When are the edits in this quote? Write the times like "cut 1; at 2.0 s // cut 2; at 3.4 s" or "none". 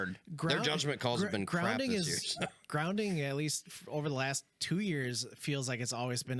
none